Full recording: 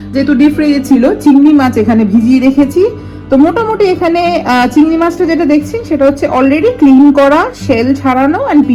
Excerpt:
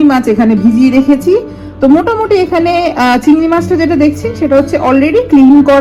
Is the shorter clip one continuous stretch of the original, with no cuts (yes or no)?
yes